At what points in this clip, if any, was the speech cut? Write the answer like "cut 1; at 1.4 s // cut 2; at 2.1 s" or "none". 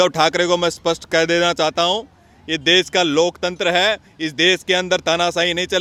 none